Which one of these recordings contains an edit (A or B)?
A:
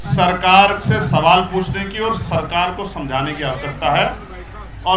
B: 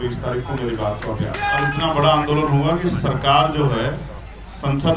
B